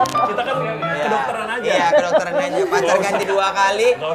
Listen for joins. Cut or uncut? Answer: uncut